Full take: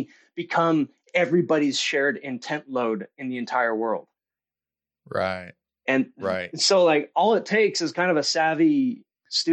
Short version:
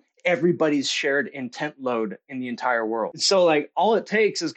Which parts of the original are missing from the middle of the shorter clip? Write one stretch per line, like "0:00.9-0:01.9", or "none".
0:04.1-0:06.6